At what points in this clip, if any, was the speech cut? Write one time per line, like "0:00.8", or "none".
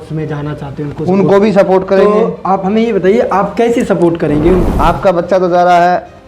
0:04.7